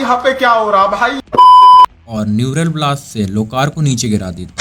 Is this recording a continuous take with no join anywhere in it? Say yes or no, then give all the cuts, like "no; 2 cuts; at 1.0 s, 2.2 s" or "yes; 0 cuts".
yes; 0 cuts